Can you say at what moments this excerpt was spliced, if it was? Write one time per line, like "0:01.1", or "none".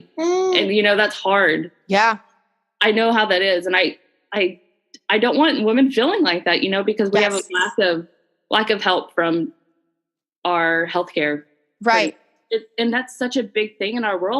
0:12.3

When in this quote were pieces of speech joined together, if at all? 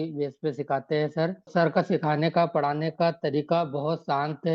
0:01.5

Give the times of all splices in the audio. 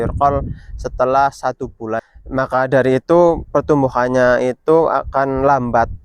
0:02.0

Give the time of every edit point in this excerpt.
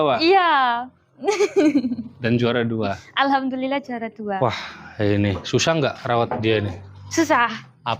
0:04.1

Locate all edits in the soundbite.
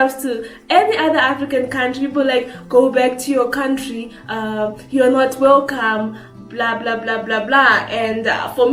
none

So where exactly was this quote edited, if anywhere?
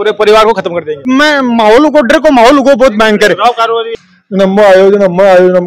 0:00.9
0:03.9

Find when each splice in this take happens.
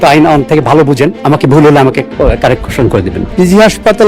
0:01.2
0:03.2

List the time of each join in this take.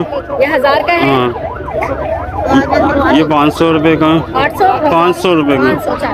none

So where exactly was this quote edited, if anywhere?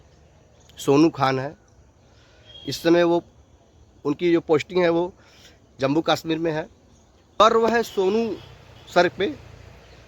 0:07.4

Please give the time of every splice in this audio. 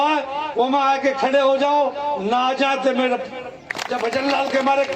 0:03.4

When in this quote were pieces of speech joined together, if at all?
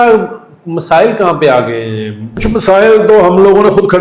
0:02.4

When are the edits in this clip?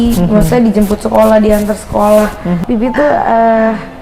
0:02.6

